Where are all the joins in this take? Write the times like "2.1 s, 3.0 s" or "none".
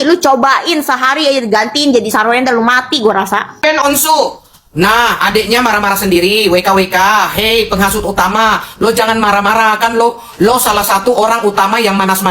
3.5 s